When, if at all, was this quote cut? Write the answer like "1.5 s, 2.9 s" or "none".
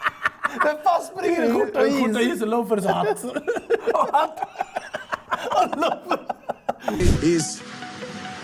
7.0 s